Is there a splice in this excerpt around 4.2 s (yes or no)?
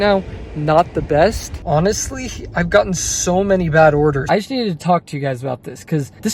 yes